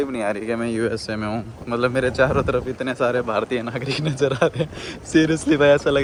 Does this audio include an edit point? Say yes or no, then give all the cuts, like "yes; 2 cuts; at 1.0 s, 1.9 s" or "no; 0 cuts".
no; 0 cuts